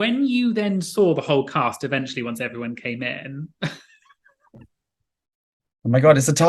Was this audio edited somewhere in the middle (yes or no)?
no